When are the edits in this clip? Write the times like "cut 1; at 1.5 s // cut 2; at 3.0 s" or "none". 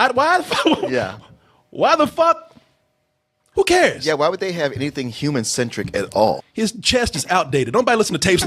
cut 1; at 6.5 s